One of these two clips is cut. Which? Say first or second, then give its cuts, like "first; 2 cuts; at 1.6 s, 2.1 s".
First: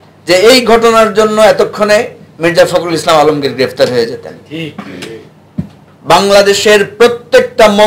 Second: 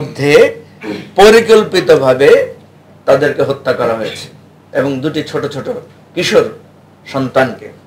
first; 1 cut; at 5.9 s